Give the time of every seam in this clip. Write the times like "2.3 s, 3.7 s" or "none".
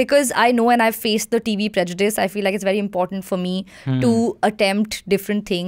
none